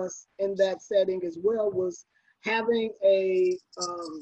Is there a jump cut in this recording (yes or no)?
no